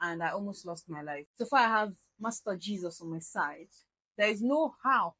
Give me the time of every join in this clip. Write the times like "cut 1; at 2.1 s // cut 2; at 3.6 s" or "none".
cut 1; at 1.2 s